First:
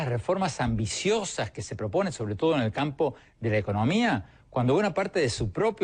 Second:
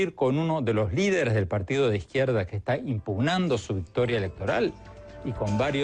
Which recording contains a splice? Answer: first; 1 cut; at 3.3 s

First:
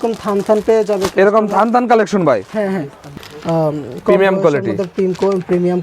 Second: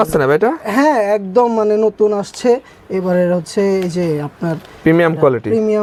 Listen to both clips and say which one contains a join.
first; 1 cut; at 3.1 s

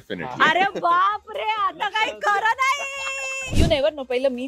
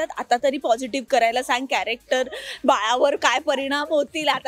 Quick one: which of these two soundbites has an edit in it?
first; 1 cut; at 3.5 s

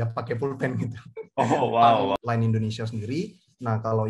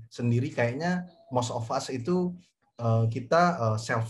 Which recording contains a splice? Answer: first; 1 cut; at 2.2 s

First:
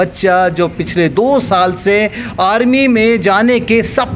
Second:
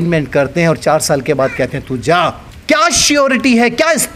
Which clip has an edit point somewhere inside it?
second; 1 cut; at 2.5 s

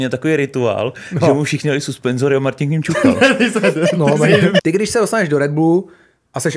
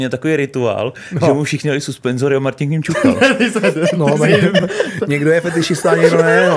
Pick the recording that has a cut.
first; 1 cut; at 4.6 s

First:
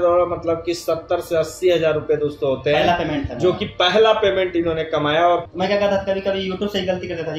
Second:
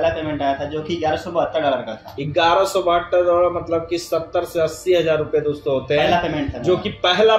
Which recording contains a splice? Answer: first; 1 cut; at 5.4 s

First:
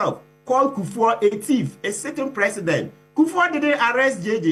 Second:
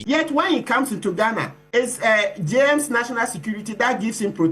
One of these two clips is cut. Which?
second; 1 cut; at 1.5 s

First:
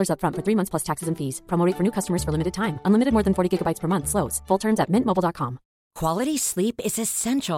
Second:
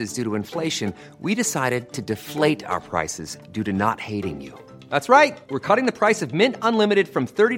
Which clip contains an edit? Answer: first; 1 cut; at 5.8 s

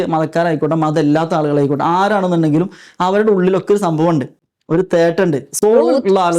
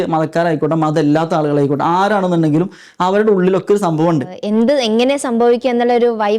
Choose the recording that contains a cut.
second; 1 cut; at 4.4 s

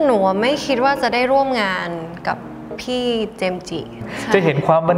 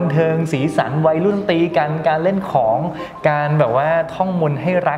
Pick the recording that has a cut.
first; 1 cut; at 3.9 s

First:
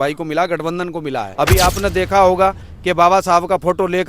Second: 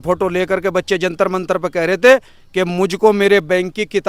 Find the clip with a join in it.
first; 1 cut; at 1.2 s

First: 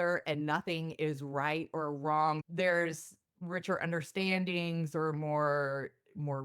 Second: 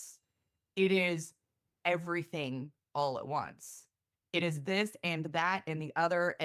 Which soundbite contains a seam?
first; 1 cut; at 2.4 s

